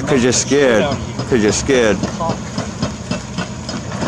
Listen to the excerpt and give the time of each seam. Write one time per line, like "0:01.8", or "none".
none